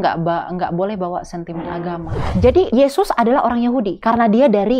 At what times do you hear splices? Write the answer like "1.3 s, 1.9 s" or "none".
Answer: 2.5 s, 3.9 s